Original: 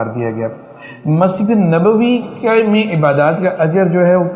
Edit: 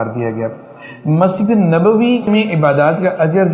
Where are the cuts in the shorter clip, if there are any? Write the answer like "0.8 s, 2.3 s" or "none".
2.3 s